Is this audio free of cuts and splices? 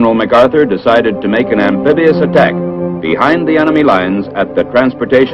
no; 1 cut; at 2.6 s

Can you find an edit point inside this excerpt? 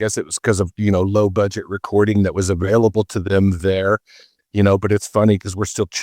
no; 0 cuts

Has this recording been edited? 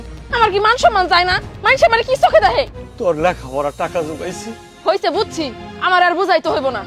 yes; 1 cut; at 2.8 s

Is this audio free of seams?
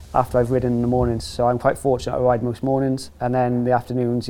no; 1 cut; at 3.1 s

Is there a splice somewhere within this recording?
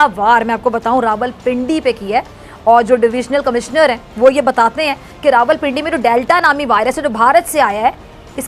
no; 0 cuts

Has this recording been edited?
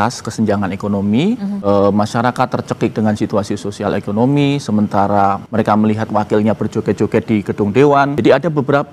yes; 3 cuts; at 1.5 s, 5.4 s, 8.1 s

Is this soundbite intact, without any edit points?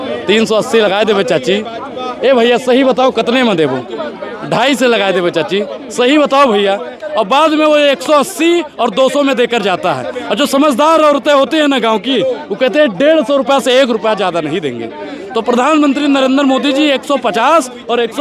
yes; 0 cuts

